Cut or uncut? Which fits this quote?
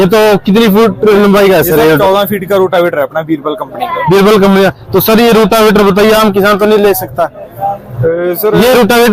uncut